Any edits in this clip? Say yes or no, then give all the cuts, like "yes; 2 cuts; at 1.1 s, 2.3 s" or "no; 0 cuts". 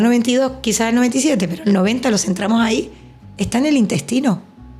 no; 0 cuts